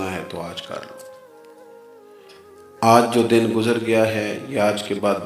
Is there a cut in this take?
yes; 2 cuts; at 1.2 s, 2.6 s

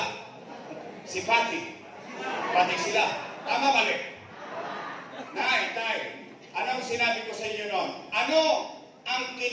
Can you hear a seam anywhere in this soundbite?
no; 0 cuts

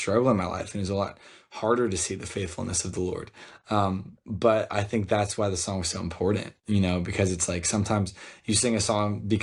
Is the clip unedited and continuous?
yes; 0 cuts

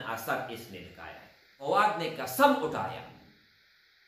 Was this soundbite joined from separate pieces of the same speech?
yes; 1 cut; at 1.7 s

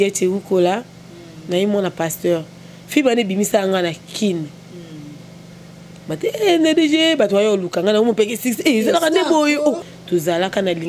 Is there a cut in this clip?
yes; 1 cut; at 9.9 s

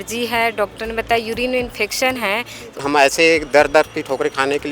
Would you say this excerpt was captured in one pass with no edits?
no; 1 cut; at 2.8 s

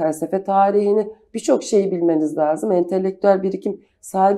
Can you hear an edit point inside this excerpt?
no; 0 cuts

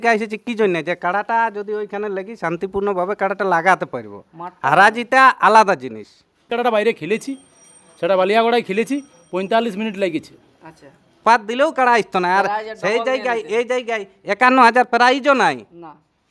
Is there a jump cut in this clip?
yes; 2 cuts; at 6.5 s, 11.2 s

